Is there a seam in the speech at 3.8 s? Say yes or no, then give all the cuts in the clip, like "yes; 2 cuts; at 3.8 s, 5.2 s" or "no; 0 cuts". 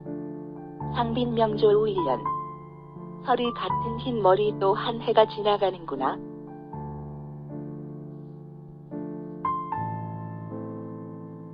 no; 1 cut; at 6.2 s